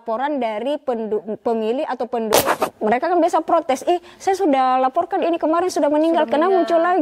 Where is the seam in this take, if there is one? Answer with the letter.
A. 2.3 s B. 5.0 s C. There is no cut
A